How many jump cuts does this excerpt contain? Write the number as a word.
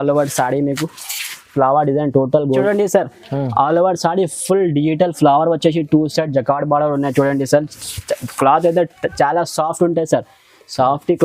one